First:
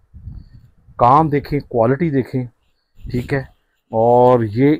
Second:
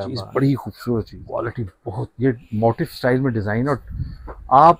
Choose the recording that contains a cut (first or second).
second